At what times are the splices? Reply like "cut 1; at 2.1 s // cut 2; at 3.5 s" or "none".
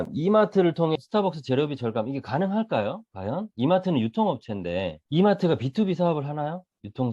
cut 1; at 1.0 s // cut 2; at 5.0 s